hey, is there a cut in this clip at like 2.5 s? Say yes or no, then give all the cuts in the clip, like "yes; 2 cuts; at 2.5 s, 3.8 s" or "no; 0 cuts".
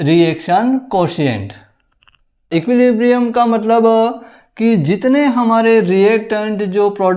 yes; 1 cut; at 2.5 s